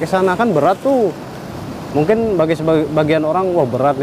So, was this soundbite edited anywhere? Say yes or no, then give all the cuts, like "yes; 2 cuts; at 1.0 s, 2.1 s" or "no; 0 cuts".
no; 0 cuts